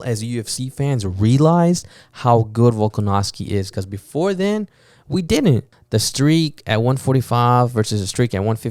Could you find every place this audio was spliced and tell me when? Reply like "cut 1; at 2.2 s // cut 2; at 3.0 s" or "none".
cut 1; at 5.7 s

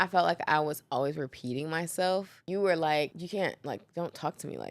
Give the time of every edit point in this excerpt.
cut 1; at 2.4 s // cut 2; at 3.2 s

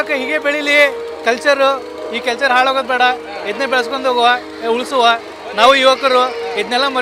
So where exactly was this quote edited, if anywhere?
none

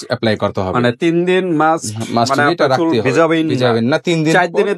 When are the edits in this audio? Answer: none

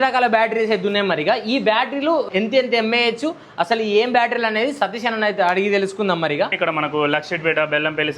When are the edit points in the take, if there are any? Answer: cut 1; at 6.5 s

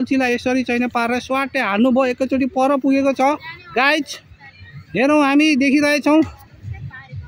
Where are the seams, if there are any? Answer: none

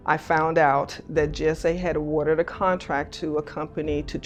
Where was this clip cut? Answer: none

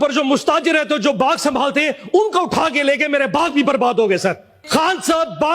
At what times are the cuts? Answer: cut 1; at 4.5 s

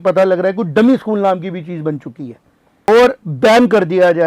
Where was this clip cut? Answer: cut 1; at 2.9 s

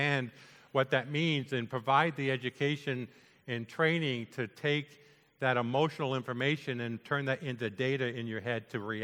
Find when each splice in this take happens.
none

